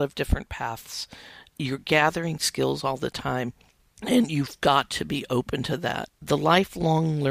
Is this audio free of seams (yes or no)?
no